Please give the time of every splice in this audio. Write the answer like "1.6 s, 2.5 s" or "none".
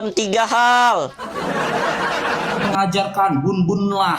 2.7 s